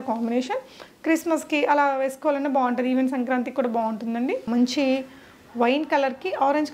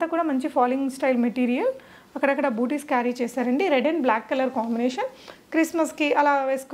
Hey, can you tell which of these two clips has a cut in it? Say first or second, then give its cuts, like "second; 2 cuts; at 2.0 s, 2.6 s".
first; 1 cut; at 4.5 s